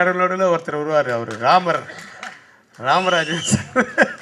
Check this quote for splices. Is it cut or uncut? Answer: uncut